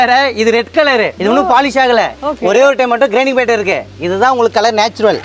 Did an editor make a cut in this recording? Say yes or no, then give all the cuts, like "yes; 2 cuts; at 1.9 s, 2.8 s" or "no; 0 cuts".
yes; 1 cut; at 1.2 s